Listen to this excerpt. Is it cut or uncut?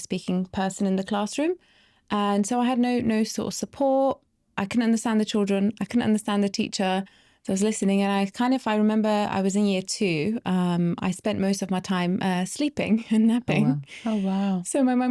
uncut